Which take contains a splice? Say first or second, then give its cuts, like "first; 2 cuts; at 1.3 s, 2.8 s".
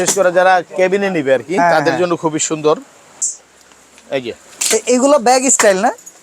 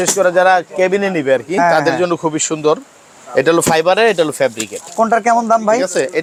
first; 1 cut; at 3.2 s